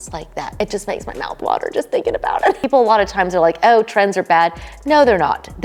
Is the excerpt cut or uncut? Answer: cut